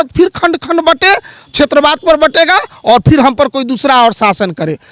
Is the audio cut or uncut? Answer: uncut